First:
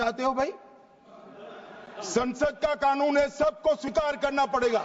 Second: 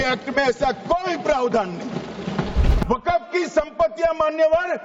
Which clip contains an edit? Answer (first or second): second